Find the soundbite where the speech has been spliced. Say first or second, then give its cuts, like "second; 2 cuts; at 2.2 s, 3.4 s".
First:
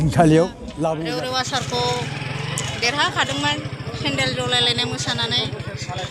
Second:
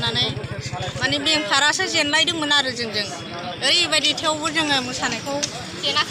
first; 1 cut; at 1.0 s